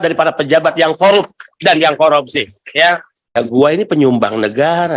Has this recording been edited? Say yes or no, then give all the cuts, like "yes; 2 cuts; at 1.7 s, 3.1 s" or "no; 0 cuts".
yes; 1 cut; at 3.3 s